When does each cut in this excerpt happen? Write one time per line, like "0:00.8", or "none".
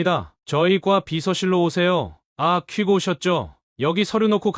0:02.2
0:03.6